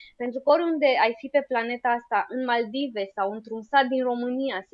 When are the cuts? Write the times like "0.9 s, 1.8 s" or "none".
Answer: none